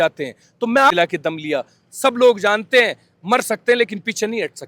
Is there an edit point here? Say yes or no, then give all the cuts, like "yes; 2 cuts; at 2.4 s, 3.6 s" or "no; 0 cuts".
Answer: yes; 1 cut; at 0.9 s